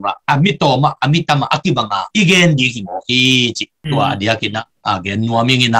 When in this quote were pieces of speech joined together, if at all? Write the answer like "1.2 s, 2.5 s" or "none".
none